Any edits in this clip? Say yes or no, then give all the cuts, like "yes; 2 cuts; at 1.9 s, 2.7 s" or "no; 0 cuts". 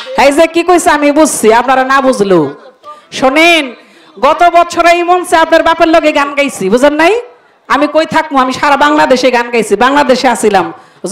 no; 0 cuts